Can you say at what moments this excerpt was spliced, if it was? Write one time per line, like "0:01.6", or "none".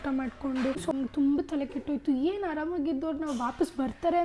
0:01.0